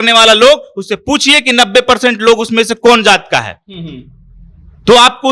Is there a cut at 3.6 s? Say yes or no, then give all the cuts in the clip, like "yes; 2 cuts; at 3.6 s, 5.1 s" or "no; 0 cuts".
no; 0 cuts